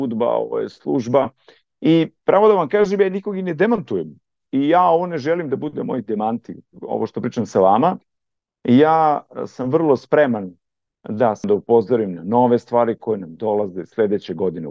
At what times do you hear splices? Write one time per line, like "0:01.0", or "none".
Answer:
0:11.4